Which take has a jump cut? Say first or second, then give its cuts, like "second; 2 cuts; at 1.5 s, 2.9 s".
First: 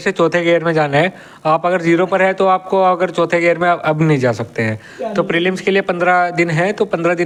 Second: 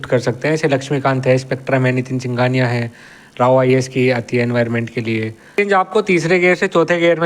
second; 1 cut; at 5.6 s